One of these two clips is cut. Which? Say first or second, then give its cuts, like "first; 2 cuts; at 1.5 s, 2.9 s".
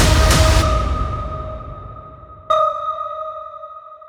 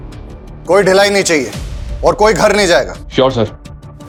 first; 1 cut; at 0.9 s